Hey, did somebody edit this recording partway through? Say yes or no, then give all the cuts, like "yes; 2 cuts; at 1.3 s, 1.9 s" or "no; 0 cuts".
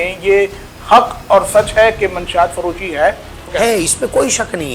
yes; 1 cut; at 3.5 s